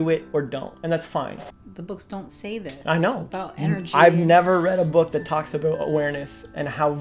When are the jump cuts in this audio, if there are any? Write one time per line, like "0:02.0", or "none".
0:01.5